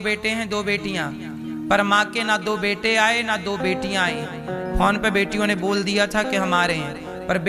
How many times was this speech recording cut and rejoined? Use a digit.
0